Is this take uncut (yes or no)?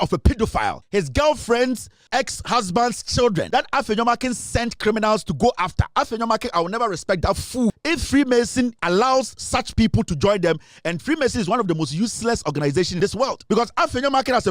no